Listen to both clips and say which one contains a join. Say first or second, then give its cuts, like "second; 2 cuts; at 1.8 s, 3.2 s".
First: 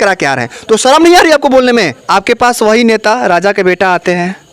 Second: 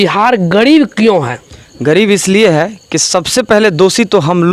first; 1 cut; at 2.0 s